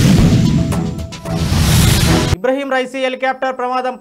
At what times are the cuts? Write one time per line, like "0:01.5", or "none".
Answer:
none